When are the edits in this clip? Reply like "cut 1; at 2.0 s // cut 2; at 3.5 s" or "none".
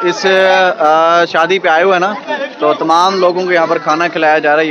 none